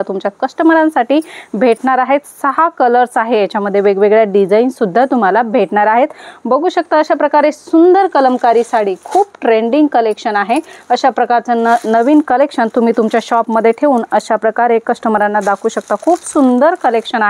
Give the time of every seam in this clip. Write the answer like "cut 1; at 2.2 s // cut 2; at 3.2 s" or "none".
none